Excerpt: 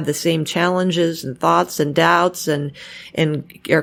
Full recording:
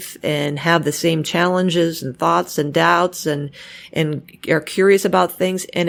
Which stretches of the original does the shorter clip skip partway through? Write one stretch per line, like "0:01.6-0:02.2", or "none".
none